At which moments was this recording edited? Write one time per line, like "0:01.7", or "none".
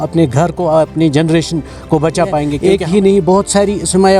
0:02.5